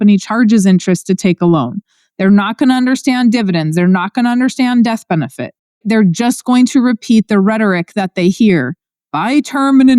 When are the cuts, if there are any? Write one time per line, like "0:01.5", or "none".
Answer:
0:05.8